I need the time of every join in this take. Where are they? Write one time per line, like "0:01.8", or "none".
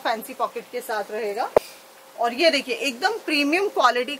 0:01.6